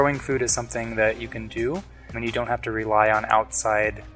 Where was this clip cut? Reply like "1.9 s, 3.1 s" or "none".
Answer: 2.2 s